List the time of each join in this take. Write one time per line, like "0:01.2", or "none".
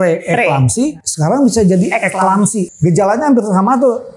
0:01.1
0:02.6